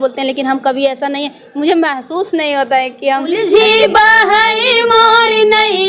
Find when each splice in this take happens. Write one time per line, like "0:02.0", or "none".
0:03.4